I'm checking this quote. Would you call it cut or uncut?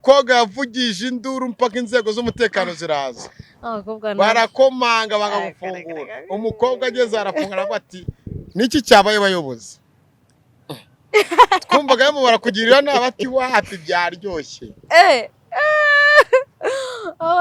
uncut